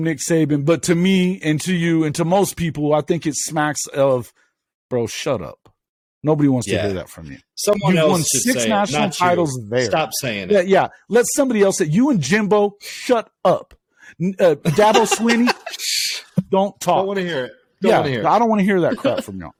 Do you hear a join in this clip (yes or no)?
no